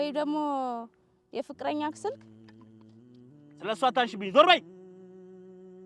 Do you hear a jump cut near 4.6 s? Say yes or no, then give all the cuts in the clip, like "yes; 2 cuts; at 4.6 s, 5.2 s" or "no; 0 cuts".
yes; 1 cut; at 4.6 s